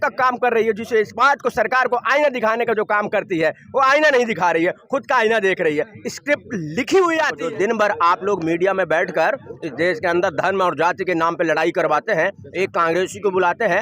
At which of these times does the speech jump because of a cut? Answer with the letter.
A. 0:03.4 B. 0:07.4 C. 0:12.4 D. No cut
B